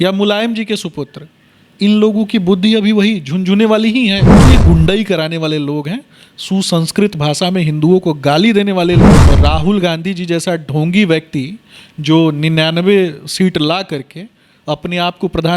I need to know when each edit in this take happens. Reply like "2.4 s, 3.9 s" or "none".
4.3 s, 9.2 s